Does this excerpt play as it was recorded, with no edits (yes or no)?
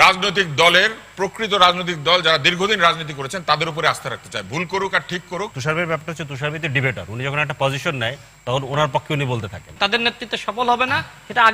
no